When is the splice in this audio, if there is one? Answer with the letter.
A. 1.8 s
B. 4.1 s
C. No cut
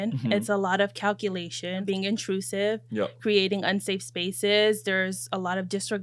A